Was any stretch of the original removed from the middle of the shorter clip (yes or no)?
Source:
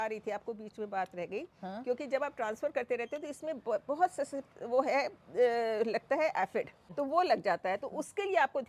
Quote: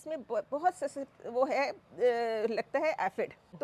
no